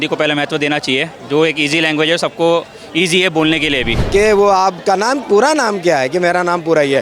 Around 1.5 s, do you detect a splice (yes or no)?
no